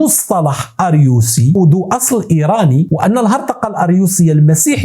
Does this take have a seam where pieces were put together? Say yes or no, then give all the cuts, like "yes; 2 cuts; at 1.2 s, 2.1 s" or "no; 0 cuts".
yes; 1 cut; at 1.6 s